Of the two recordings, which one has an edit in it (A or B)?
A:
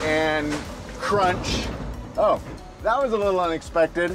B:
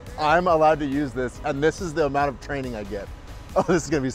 A